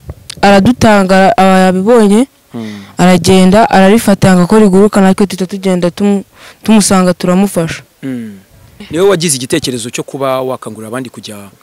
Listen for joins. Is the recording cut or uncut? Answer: cut